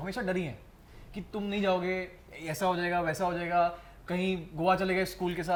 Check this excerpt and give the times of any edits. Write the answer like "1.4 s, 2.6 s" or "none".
none